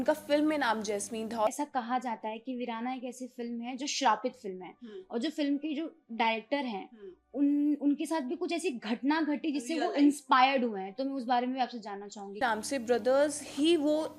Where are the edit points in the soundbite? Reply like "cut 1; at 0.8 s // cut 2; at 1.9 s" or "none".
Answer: cut 1; at 1.5 s // cut 2; at 12.4 s

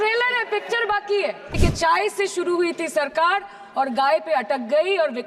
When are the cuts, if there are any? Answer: cut 1; at 1.6 s

